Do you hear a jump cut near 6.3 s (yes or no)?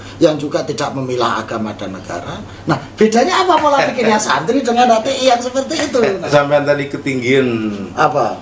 yes